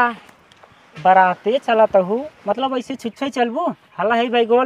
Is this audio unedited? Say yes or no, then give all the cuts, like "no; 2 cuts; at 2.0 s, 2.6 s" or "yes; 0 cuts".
yes; 0 cuts